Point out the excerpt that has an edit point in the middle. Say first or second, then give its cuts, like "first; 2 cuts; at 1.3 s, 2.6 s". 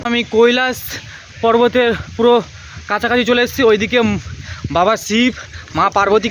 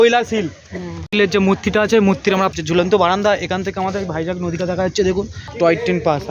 second; 3 cuts; at 0.9 s, 2.5 s, 5.4 s